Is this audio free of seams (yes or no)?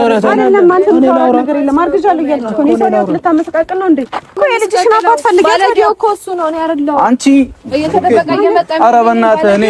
no